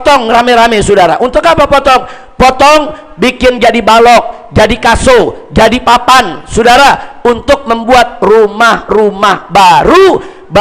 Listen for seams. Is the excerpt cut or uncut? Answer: uncut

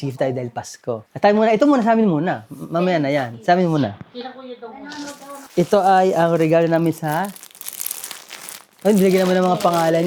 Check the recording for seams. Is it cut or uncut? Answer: uncut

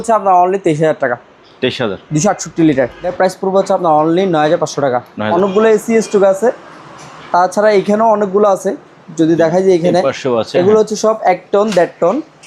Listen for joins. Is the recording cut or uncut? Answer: cut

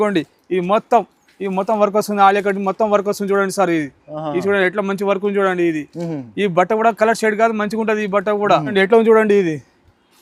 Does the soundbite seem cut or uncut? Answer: cut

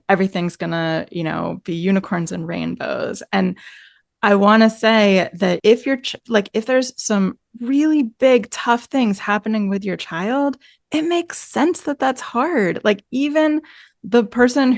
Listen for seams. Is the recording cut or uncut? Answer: cut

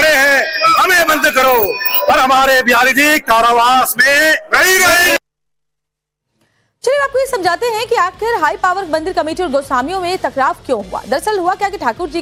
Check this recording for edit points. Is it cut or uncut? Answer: uncut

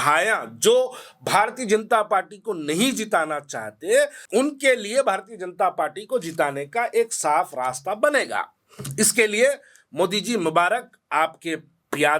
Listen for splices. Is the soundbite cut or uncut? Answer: cut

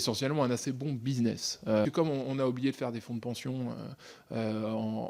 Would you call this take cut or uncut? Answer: cut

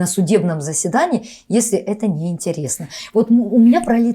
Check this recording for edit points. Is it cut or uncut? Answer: uncut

